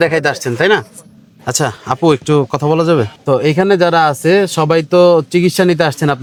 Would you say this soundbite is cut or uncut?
uncut